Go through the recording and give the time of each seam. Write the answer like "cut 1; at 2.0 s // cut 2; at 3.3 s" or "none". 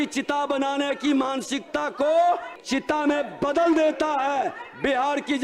cut 1; at 2.5 s